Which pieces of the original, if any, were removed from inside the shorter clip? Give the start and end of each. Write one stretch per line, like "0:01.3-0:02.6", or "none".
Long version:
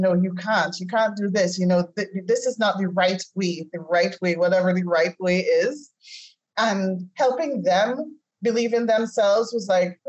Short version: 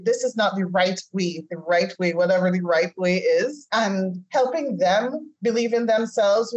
0:05.8-0:06.5
0:08.1-0:08.2